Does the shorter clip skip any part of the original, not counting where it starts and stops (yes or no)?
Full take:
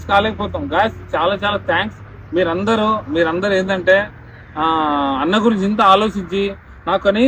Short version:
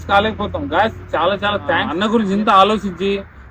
yes